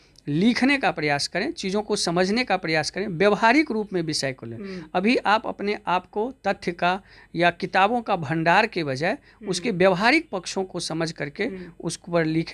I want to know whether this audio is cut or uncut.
uncut